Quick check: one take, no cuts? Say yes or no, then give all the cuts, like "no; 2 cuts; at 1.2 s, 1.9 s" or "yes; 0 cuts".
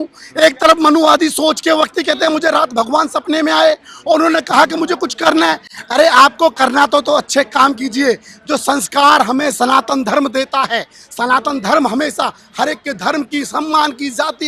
yes; 0 cuts